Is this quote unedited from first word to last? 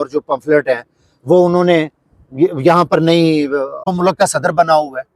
no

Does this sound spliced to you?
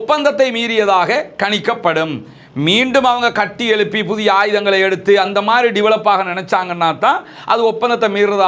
no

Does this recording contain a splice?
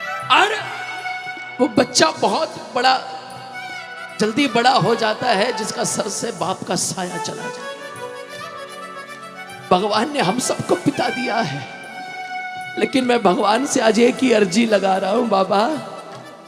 no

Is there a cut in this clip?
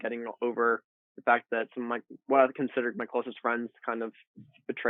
no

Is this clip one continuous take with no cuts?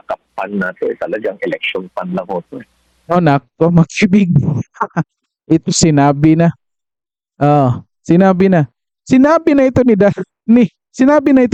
yes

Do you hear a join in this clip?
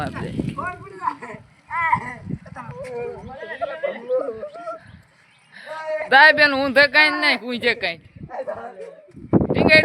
no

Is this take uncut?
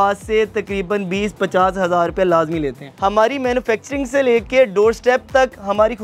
no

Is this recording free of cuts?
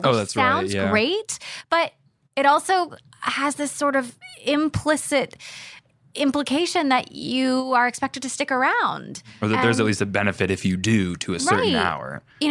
no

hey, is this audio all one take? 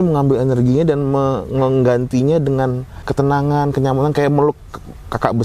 no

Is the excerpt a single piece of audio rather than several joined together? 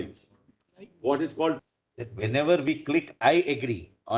no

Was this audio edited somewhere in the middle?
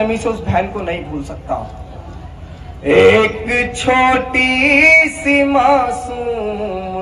no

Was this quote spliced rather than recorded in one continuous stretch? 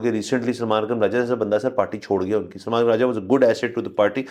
no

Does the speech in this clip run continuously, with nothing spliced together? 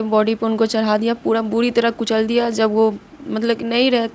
yes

